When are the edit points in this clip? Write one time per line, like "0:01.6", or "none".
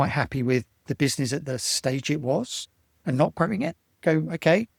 none